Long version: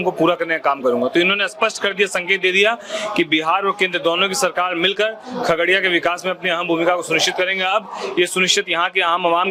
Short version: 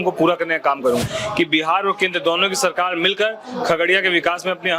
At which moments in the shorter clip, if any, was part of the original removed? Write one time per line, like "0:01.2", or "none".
0:01.0